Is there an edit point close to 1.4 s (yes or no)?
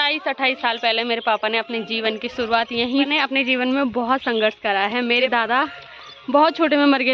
no